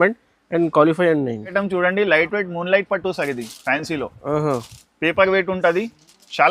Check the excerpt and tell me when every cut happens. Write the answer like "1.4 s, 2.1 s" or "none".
none